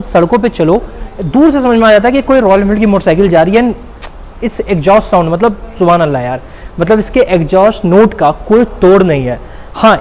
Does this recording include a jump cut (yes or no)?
no